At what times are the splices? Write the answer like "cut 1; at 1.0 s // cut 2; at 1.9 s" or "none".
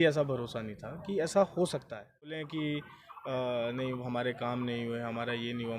cut 1; at 2.5 s